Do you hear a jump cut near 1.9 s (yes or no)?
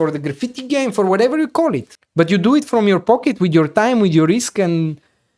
yes